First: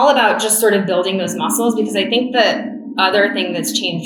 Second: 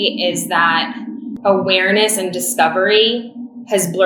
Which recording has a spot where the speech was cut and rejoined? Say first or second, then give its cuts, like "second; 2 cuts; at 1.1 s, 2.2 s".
second; 1 cut; at 1.3 s